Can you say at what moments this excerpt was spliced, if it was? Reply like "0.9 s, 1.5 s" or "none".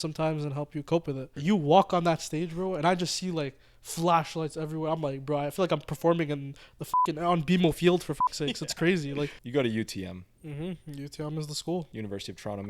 1.3 s, 9.4 s, 11.9 s